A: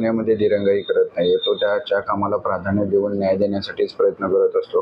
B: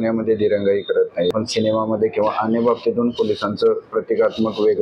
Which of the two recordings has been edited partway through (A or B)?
B